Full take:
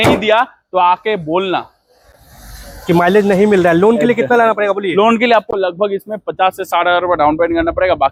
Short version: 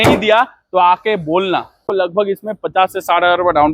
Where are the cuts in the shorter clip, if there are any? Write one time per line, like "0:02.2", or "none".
0:01.8